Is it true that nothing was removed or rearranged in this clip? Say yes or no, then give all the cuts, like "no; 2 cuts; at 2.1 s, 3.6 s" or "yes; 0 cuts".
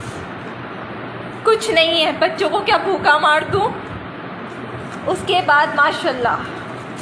yes; 0 cuts